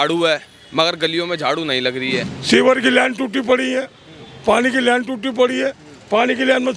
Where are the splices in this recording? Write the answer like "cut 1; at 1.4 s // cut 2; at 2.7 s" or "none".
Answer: cut 1; at 2.3 s